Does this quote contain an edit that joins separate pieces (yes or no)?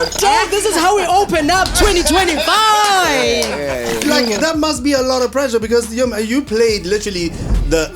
yes